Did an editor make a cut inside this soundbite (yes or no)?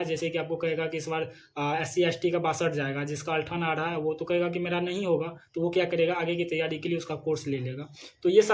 no